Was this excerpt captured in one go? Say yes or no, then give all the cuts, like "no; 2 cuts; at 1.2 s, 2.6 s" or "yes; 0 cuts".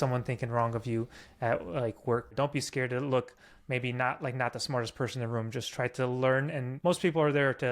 no; 2 cuts; at 2.3 s, 6.7 s